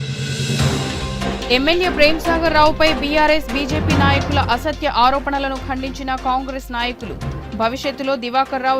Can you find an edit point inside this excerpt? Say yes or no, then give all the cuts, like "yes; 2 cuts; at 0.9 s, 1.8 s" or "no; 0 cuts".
yes; 1 cut; at 1.4 s